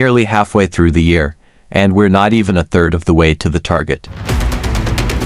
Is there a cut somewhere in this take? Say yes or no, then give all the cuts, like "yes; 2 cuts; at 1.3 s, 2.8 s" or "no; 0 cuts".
yes; 1 cut; at 4.1 s